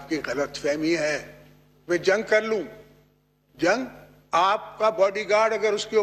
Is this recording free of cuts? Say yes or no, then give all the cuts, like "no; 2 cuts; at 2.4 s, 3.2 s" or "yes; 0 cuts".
yes; 0 cuts